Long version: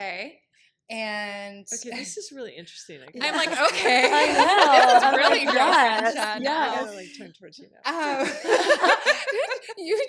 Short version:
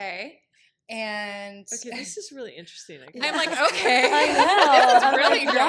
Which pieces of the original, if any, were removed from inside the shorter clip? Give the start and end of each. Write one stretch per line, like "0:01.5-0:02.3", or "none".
none